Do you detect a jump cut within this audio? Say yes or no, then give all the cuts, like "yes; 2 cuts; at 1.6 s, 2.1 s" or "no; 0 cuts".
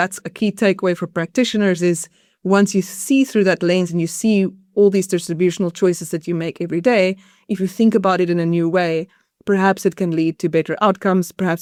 no; 0 cuts